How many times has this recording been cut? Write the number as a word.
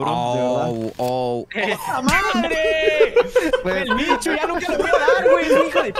zero